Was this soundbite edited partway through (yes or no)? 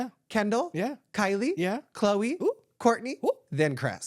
no